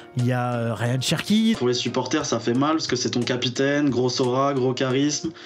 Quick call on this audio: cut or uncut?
cut